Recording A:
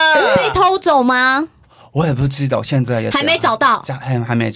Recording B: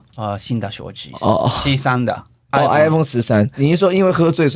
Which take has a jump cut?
B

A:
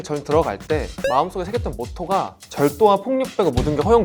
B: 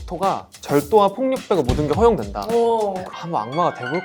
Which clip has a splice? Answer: B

